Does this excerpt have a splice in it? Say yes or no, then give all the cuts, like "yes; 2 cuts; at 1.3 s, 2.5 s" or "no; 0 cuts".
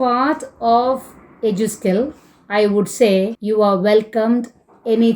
yes; 1 cut; at 3.4 s